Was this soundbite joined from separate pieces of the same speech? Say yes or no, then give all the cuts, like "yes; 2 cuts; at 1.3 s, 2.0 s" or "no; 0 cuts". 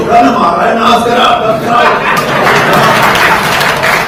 no; 0 cuts